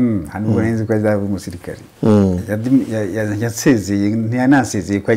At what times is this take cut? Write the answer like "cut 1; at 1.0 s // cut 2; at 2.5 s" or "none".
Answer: none